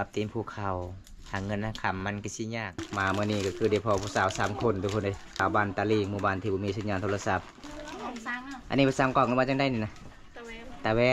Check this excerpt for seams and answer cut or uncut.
cut